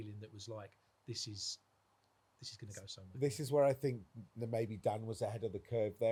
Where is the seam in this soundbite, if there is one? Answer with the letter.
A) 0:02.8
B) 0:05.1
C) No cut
C